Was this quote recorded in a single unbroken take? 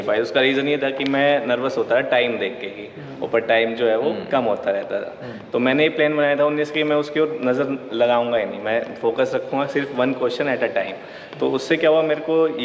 yes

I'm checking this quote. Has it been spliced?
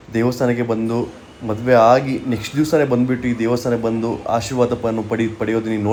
no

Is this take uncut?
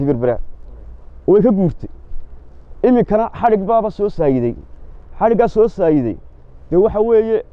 yes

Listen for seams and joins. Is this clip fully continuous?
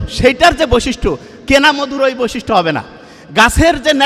yes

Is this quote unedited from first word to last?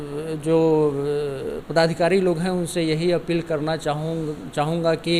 yes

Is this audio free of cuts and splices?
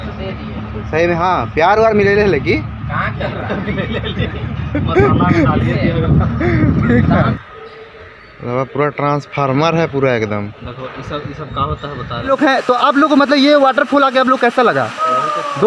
no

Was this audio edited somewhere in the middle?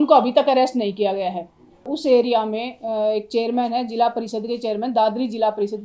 yes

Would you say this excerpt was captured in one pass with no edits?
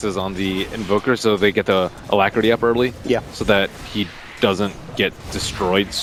yes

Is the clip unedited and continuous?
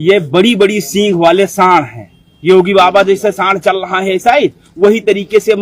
yes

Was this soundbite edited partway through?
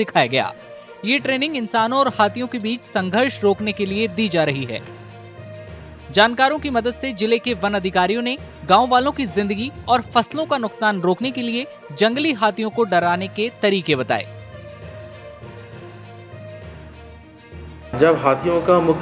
yes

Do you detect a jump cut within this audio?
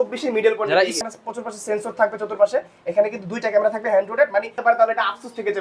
yes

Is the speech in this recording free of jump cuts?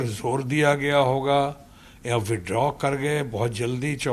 yes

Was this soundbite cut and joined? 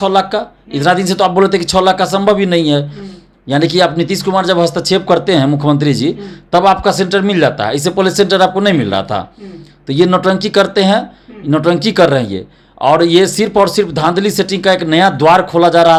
no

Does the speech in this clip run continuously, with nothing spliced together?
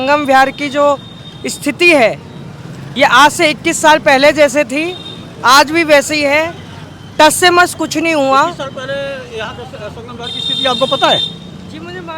yes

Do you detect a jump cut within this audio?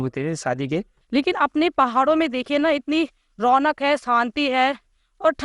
yes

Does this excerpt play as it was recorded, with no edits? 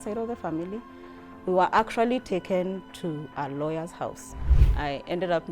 no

